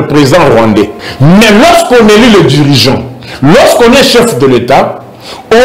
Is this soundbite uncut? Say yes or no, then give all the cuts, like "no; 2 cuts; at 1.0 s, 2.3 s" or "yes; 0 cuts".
no; 1 cut; at 1.0 s